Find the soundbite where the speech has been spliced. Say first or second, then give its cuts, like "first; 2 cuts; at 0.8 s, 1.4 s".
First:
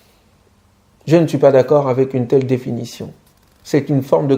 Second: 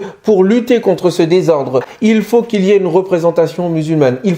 second; 1 cut; at 1.9 s